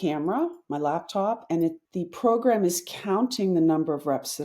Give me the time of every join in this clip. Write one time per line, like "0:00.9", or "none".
0:01.8